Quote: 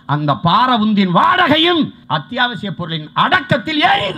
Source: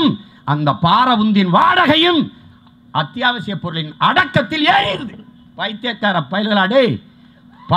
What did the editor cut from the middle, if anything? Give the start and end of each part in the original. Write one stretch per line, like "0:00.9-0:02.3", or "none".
0:02.4-0:02.8